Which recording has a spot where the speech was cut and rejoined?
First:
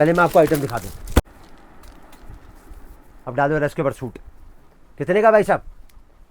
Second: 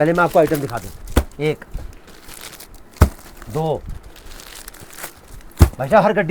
first; 1 cut; at 1.3 s

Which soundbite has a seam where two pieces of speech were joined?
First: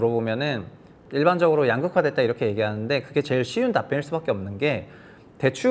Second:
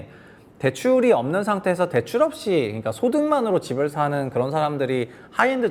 first; 1 cut; at 1.0 s

